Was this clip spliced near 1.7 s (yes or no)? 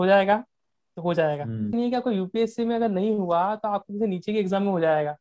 yes